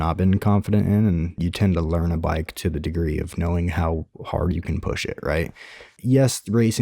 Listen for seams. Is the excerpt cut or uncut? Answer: cut